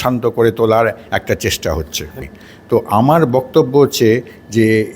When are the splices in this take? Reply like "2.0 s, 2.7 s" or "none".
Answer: 2.2 s